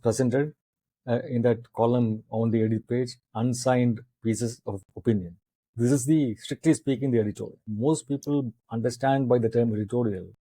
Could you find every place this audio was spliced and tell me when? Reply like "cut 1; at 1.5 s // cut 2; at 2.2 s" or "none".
cut 1; at 7.6 s